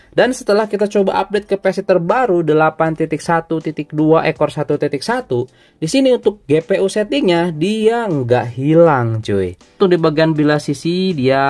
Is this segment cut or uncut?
cut